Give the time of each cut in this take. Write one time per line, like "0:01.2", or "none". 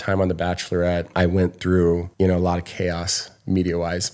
0:01.1
0:02.1